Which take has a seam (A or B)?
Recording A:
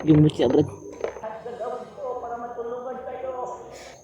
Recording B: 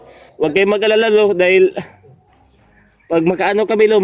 A